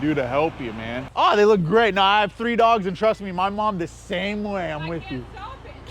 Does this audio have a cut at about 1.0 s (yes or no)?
yes